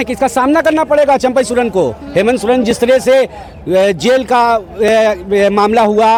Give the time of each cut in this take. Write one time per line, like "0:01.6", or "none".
none